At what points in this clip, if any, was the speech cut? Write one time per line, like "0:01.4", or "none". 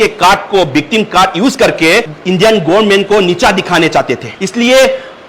0:04.3